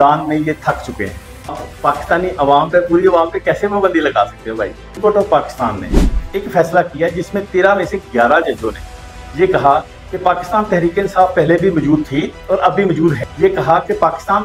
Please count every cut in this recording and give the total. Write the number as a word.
three